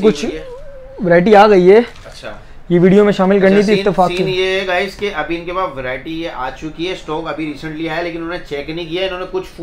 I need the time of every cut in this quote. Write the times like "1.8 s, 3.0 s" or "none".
none